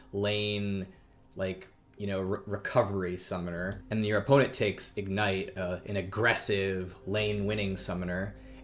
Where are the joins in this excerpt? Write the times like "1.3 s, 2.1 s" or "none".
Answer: 3.8 s